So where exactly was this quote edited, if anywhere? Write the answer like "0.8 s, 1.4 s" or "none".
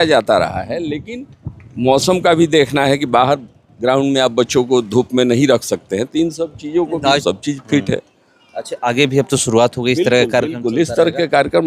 7.2 s